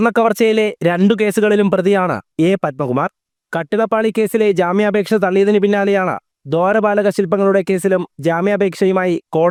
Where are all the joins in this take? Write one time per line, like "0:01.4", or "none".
none